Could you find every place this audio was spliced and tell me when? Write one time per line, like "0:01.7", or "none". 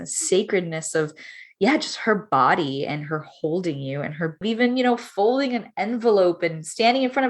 0:04.4